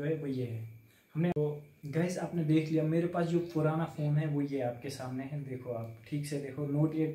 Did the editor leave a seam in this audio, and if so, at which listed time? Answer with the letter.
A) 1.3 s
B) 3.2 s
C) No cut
A